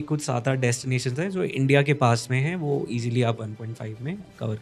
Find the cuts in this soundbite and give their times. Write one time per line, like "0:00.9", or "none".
none